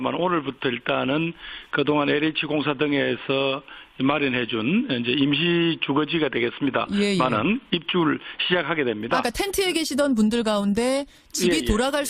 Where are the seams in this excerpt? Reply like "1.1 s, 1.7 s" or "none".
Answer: 2.4 s